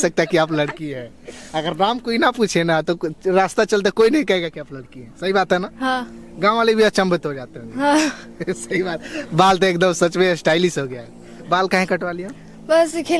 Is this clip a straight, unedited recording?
yes; 0 cuts

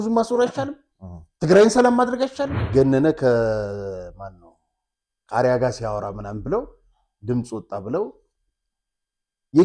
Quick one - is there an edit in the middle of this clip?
yes; 1 cut; at 2.6 s

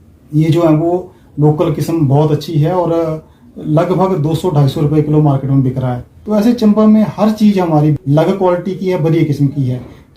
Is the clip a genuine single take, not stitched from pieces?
no; 2 cuts; at 6.1 s, 8.0 s

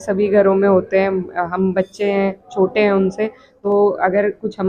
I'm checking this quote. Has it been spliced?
yes; 1 cut; at 3.4 s

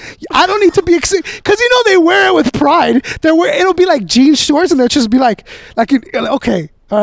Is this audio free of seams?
yes; 0 cuts

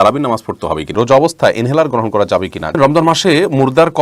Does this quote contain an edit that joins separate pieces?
yes; 2 cuts; at 0.9 s, 2.8 s

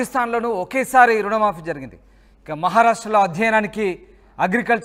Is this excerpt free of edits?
yes; 0 cuts

